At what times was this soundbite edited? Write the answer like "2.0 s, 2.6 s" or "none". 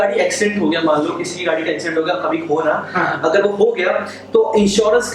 none